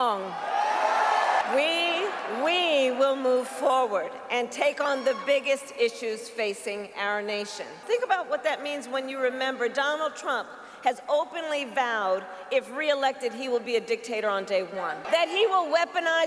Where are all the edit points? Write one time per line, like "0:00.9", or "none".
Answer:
0:01.4
0:07.8